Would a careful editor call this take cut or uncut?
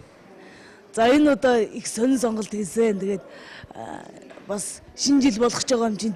uncut